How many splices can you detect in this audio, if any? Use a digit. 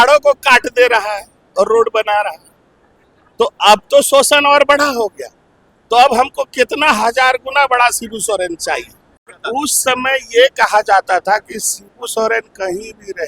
1